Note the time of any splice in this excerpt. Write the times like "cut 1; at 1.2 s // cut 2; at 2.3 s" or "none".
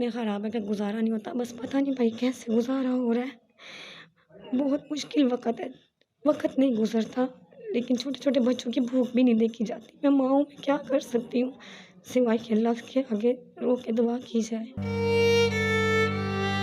cut 1; at 14.7 s